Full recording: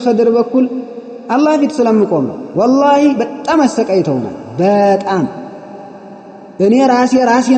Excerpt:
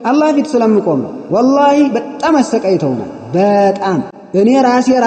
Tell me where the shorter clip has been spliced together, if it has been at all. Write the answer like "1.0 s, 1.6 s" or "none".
4.2 s